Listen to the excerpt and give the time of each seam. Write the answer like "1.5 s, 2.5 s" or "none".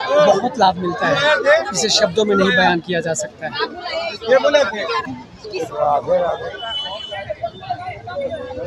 none